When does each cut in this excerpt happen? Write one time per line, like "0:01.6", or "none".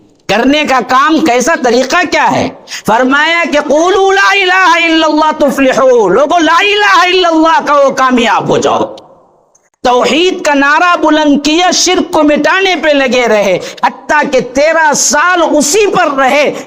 none